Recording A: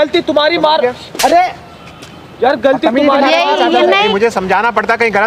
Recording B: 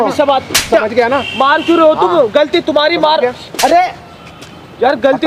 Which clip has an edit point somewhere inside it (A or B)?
A